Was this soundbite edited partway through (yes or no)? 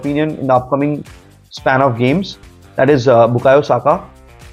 no